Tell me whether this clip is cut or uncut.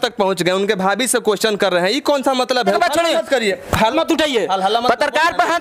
cut